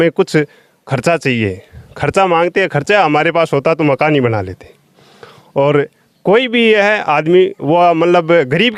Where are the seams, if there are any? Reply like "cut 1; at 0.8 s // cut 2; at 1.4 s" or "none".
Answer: none